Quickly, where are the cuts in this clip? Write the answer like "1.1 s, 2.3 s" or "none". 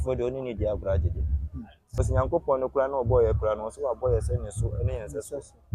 2.0 s